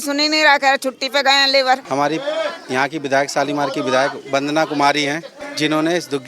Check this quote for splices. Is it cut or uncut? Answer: cut